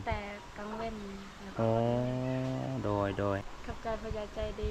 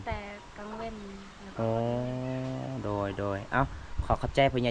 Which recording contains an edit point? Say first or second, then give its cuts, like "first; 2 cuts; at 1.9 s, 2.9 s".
first; 1 cut; at 3.4 s